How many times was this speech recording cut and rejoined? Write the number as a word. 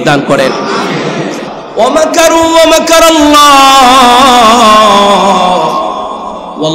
one